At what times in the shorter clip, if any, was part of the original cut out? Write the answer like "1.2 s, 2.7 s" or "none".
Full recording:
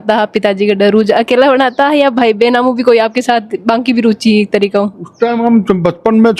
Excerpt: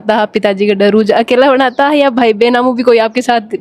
none

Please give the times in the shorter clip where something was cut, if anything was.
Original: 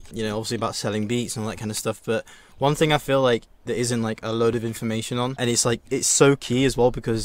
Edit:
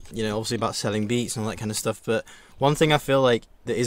none

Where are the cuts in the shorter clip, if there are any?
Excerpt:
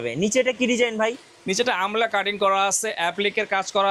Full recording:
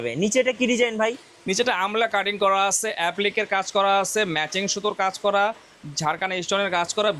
none

